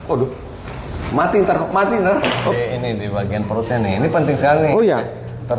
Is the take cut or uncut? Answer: cut